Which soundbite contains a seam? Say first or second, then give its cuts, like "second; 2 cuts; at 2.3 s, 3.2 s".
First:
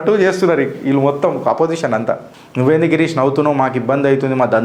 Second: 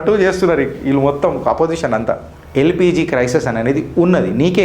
second; 1 cut; at 2.3 s